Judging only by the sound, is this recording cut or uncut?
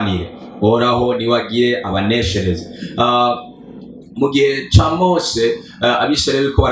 uncut